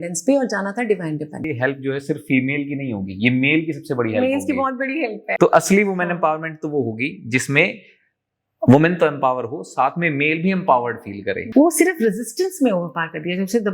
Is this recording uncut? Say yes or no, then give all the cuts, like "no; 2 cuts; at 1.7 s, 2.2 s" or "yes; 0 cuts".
no; 3 cuts; at 1.5 s, 5.2 s, 11.3 s